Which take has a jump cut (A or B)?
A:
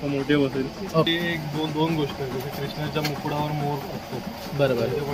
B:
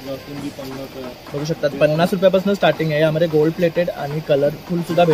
A